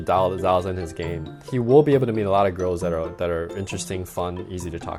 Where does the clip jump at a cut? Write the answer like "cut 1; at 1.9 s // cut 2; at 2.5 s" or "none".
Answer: none